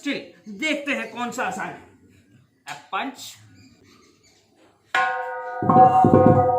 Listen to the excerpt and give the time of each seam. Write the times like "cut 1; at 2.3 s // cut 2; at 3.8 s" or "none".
cut 1; at 3.8 s